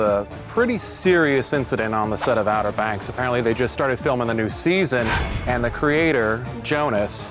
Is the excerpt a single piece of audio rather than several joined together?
yes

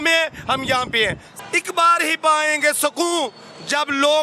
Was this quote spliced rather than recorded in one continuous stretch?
yes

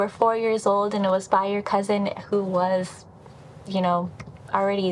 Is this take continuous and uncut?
yes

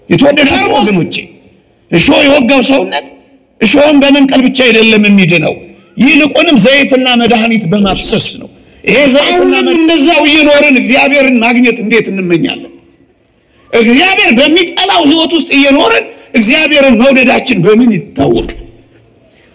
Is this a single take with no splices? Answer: no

